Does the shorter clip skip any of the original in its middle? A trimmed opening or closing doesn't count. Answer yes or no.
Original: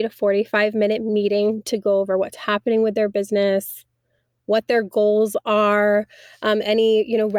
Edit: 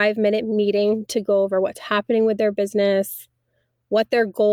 no